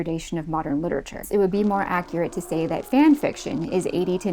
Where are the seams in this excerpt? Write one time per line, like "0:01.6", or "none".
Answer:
0:01.3

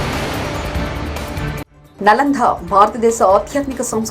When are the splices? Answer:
0:01.8

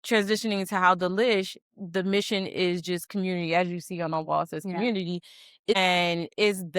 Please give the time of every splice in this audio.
0:05.7

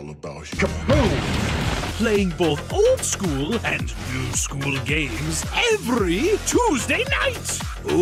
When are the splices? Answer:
none

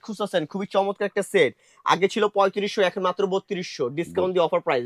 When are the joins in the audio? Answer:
none

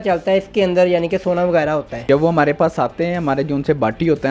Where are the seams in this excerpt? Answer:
0:01.9

